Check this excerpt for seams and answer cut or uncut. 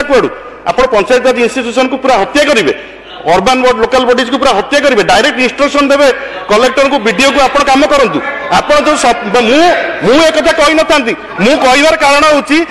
uncut